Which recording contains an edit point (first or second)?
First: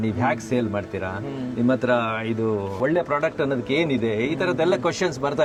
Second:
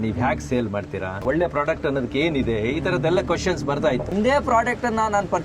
second